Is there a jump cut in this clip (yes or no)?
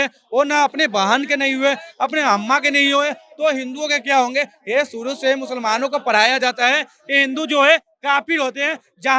no